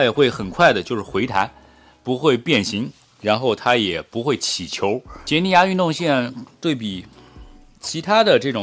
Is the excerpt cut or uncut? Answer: cut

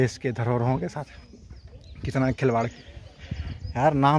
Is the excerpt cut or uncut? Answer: cut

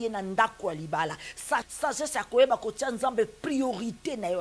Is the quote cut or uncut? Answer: cut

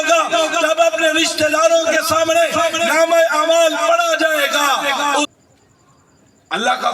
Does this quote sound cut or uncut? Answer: cut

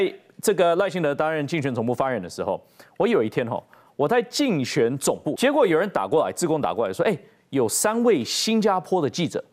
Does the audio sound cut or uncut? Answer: cut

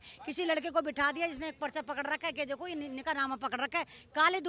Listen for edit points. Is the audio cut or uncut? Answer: uncut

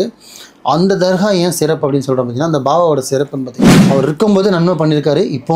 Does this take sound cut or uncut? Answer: cut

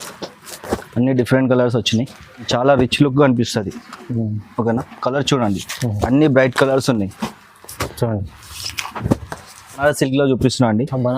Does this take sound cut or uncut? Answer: cut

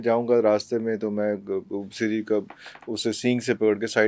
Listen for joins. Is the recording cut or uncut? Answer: uncut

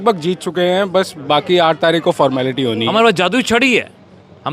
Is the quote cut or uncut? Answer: cut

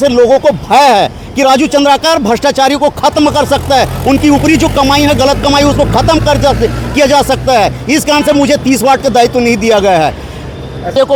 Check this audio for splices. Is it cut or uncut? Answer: uncut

